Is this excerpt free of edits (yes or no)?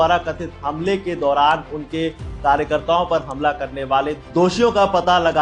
yes